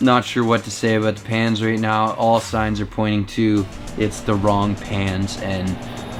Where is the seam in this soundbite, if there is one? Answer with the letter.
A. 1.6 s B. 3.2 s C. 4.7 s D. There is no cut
D